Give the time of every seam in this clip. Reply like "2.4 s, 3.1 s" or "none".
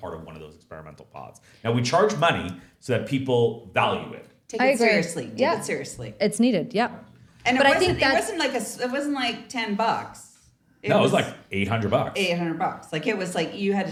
none